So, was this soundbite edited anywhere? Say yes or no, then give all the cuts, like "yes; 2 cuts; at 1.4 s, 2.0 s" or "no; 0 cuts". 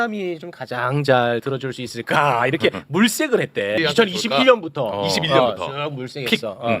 yes; 1 cut; at 3.7 s